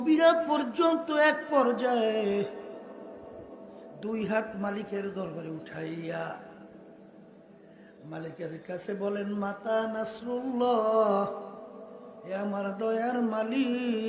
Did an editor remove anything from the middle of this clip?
no; 0 cuts

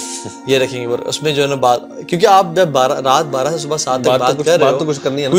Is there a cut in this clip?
no; 0 cuts

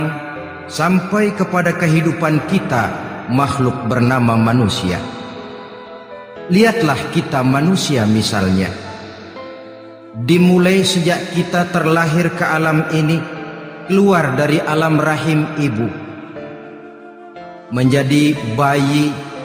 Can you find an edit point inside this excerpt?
yes; 2 cuts; at 16.3 s, 17.7 s

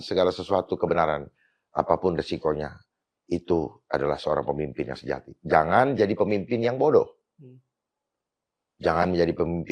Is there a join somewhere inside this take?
no; 0 cuts

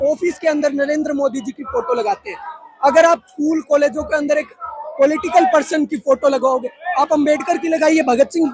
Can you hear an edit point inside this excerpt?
no; 0 cuts

